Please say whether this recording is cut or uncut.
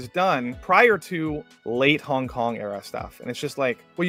uncut